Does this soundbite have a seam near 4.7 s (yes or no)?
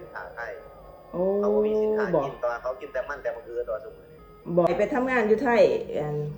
yes